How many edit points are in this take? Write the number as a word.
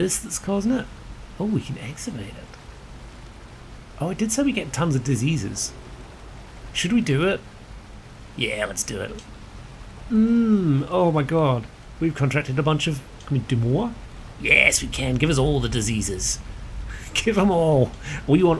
zero